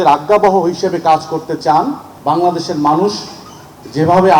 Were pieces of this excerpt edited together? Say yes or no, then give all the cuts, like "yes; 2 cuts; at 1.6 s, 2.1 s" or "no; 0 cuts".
yes; 1 cut; at 2.1 s